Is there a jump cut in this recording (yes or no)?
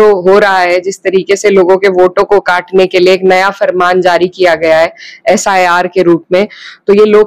no